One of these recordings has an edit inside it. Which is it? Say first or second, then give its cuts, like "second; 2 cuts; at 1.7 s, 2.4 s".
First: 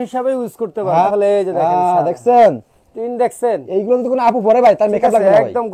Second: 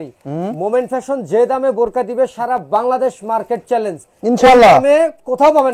first; 1 cut; at 1.1 s